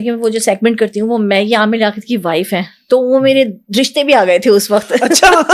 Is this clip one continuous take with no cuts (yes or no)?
yes